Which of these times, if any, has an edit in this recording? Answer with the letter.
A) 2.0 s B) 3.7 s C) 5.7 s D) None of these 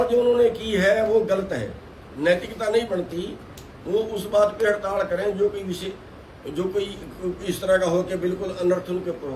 D